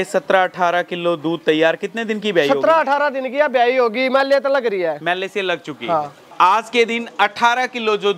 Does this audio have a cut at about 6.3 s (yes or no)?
yes